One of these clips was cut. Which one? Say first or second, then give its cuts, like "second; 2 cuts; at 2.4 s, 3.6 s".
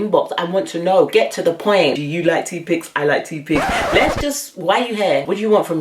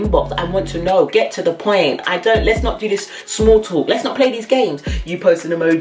first; 1 cut; at 2.0 s